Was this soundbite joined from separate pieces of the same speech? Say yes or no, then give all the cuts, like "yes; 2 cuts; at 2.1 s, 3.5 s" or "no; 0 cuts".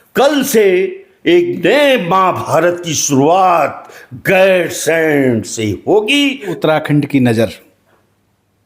yes; 1 cut; at 6.5 s